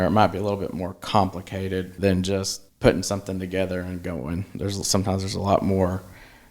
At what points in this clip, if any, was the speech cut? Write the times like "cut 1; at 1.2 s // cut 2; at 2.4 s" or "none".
cut 1; at 1.9 s // cut 2; at 2.6 s